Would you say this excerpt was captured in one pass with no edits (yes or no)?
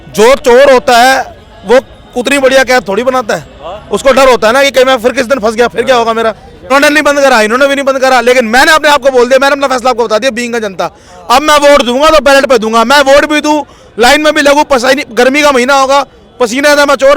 no